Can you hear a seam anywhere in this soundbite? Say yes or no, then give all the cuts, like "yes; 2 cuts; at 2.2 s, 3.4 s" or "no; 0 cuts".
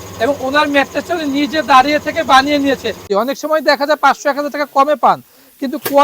yes; 1 cut; at 3.1 s